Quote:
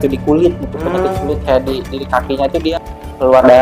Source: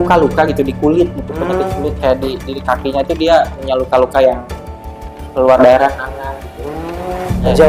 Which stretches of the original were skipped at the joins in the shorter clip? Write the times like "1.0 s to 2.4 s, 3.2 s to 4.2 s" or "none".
3.3 s to 4.9 s